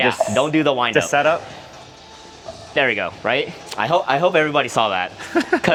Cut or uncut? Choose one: uncut